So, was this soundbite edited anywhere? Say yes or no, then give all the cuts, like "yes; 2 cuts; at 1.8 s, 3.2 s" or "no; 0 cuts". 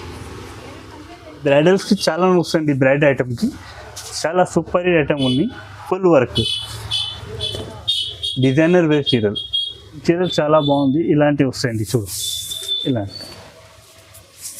yes; 2 cuts; at 1.4 s, 10.0 s